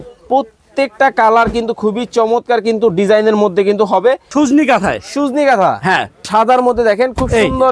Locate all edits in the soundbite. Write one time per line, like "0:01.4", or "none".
0:04.2
0:06.2